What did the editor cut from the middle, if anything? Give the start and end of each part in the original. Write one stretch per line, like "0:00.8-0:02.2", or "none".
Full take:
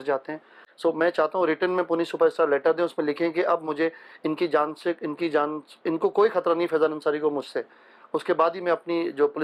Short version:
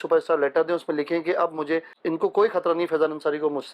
0:04.0-0:05.7